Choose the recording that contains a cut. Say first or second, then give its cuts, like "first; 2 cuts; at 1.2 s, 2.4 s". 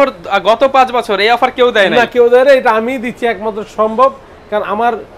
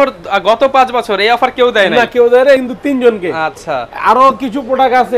second; 1 cut; at 2.6 s